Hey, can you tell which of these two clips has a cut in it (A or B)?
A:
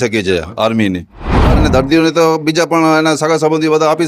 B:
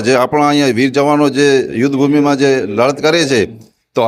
A